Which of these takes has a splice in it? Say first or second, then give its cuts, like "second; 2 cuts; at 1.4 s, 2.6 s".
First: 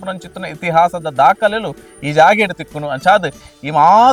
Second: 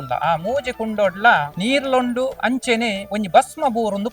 second; 1 cut; at 1.5 s